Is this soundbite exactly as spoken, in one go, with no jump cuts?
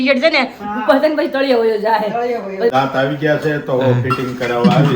no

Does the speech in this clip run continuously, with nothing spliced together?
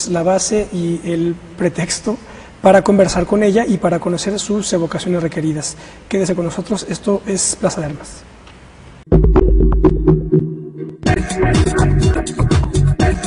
yes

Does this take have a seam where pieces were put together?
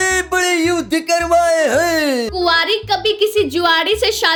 no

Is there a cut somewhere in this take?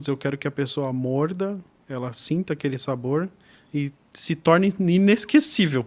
no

